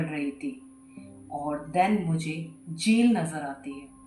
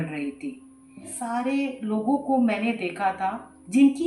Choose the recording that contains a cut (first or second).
second